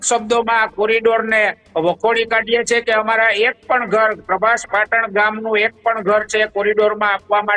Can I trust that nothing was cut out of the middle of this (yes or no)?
yes